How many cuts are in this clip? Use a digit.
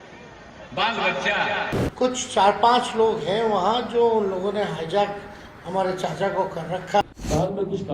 2